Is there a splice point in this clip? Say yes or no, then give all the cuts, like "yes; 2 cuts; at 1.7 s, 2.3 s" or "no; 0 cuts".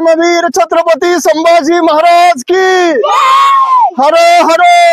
no; 0 cuts